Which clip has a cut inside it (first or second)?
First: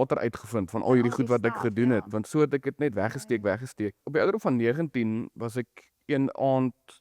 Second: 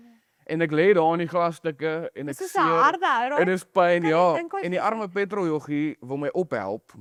first